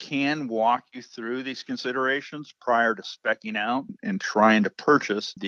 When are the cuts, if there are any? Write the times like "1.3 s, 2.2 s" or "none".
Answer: none